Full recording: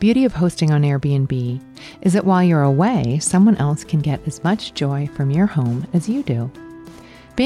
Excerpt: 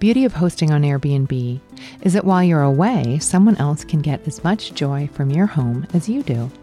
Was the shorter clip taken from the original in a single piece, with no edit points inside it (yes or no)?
yes